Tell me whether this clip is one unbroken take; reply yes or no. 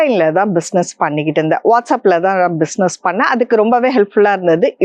yes